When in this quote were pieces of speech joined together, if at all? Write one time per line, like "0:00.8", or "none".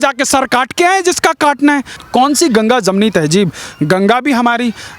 0:01.9